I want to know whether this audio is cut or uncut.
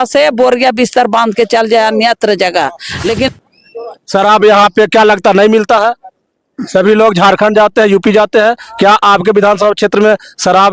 cut